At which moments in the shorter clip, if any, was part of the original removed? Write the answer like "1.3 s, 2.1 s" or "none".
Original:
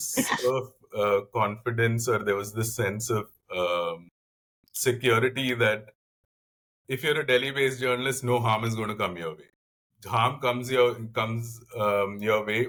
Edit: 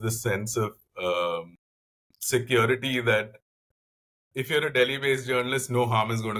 none